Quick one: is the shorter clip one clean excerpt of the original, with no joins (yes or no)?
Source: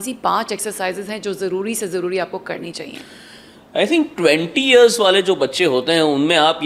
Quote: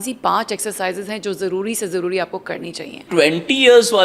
no